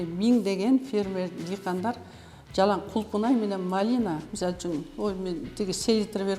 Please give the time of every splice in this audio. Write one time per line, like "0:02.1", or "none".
0:04.3